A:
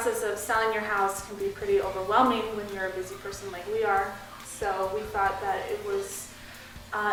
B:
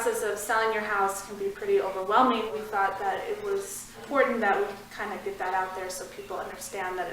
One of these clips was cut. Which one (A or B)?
B